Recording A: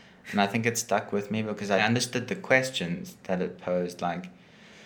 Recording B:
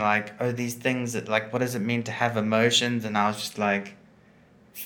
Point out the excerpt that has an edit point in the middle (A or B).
A